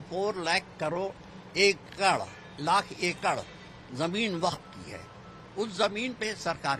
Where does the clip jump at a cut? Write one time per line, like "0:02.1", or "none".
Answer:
none

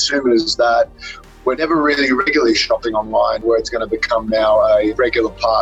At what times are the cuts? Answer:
0:01.6
0:03.4
0:04.9

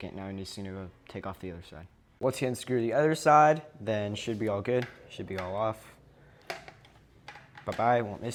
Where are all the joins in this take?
none

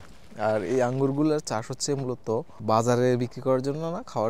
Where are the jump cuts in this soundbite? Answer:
0:02.6

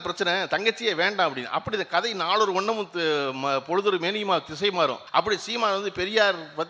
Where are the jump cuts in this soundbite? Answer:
0:05.0

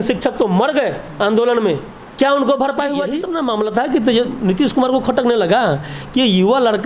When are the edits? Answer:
0:03.2

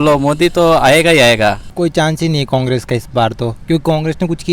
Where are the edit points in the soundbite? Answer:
0:01.7

